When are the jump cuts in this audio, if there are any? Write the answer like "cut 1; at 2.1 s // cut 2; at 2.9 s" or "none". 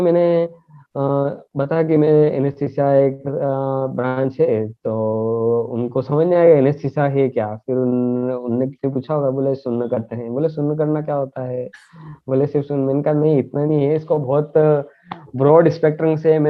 none

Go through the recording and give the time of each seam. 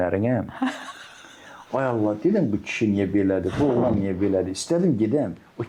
none

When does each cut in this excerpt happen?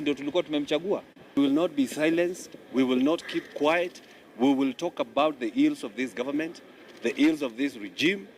cut 1; at 1.3 s

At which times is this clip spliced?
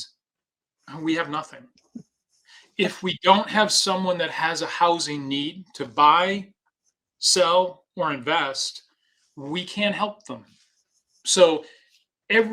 none

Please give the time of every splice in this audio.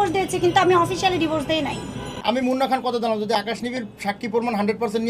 cut 1; at 2.0 s

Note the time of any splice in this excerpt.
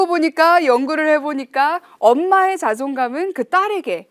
none

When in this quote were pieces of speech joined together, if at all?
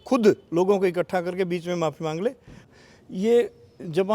cut 1; at 2.6 s

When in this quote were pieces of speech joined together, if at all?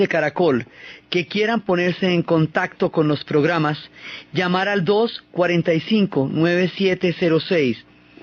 none

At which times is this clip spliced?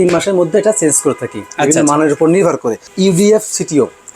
cut 1; at 2.8 s

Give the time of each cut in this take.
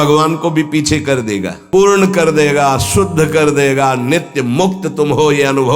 cut 1; at 1.6 s

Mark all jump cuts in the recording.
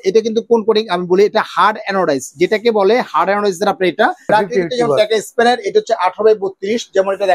cut 1; at 4.3 s

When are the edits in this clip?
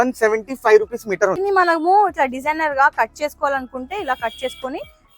cut 1; at 1.4 s

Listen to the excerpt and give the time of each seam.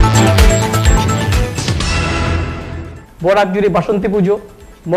cut 1; at 1.6 s // cut 2; at 2.9 s

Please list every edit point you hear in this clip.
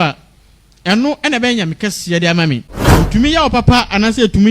cut 1; at 2.8 s

